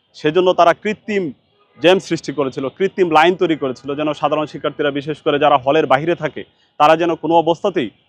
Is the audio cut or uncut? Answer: uncut